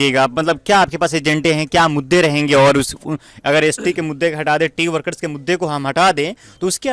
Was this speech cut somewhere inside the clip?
no; 0 cuts

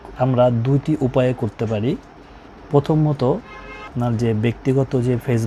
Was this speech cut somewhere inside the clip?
no; 0 cuts

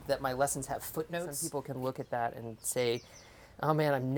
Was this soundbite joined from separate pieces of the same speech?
yes; 1 cut; at 1.4 s

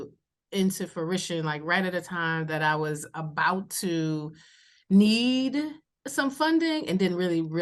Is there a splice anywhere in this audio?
no; 0 cuts

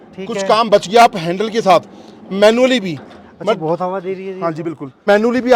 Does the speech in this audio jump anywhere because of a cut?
no; 0 cuts

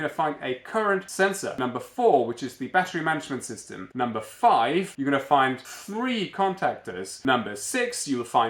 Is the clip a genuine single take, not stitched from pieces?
no; 4 cuts; at 1.5 s, 4.9 s, 5.7 s, 7.1 s

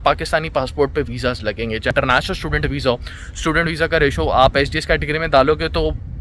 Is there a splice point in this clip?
yes; 1 cut; at 1.9 s

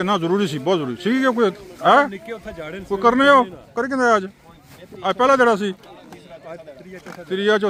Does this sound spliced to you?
no; 0 cuts

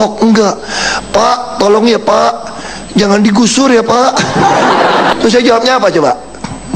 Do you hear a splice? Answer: yes; 1 cut; at 5.2 s

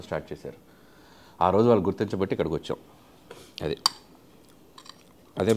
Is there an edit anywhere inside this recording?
no; 0 cuts

